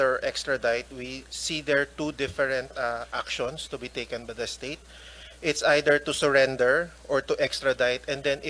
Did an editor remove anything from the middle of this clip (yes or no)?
no